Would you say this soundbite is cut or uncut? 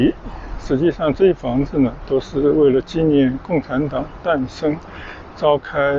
uncut